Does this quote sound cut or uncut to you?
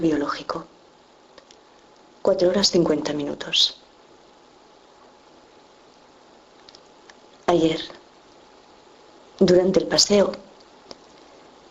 cut